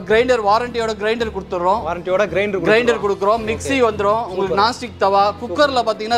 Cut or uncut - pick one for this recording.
uncut